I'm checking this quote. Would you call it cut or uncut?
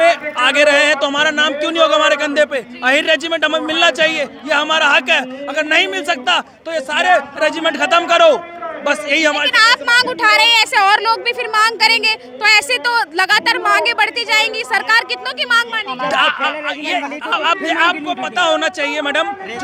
uncut